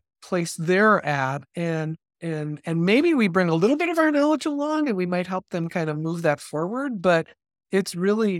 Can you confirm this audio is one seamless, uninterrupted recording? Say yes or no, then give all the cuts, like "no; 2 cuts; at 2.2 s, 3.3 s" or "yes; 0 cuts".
yes; 0 cuts